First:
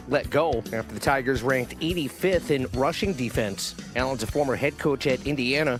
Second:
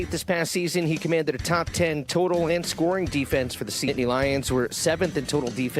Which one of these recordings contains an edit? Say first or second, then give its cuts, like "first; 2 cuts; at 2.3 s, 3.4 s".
second; 1 cut; at 3.9 s